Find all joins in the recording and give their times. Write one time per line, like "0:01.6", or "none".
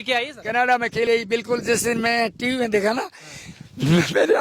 0:00.9